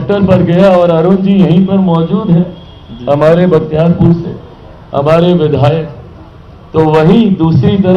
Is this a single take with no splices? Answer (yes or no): yes